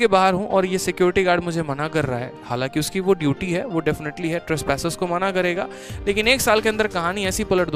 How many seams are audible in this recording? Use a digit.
0